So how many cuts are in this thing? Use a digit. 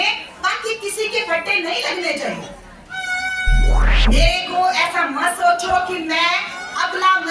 1